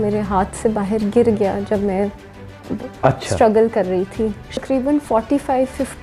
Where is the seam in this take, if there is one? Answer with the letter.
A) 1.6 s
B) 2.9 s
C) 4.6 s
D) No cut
C